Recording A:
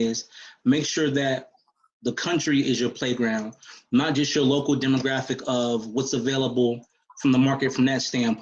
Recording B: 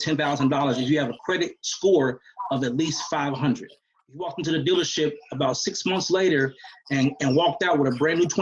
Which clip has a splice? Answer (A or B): B